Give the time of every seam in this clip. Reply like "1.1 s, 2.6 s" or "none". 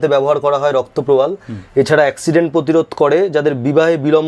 none